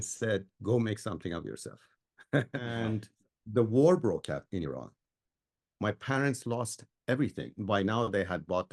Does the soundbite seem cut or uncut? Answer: cut